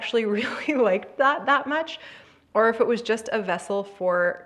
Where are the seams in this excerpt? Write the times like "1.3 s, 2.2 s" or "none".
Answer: none